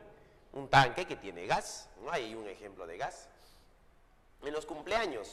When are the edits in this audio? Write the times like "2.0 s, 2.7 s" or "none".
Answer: none